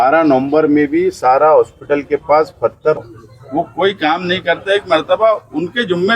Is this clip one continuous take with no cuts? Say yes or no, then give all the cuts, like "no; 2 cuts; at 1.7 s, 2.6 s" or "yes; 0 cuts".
no; 1 cut; at 3.0 s